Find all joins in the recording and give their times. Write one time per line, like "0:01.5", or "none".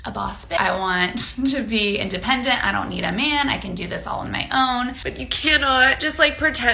0:05.0